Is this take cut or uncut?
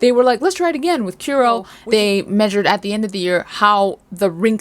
cut